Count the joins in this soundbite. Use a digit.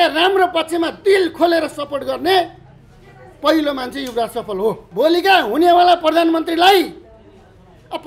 1